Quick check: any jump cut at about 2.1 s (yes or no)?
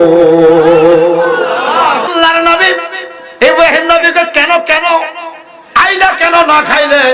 yes